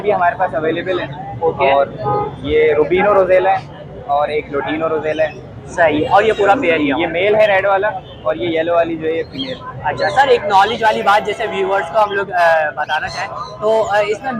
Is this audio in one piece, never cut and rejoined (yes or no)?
yes